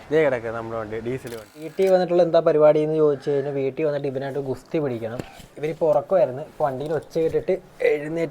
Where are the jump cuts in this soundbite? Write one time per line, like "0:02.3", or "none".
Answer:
0:01.6